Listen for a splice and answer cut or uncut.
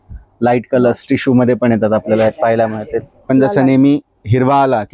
cut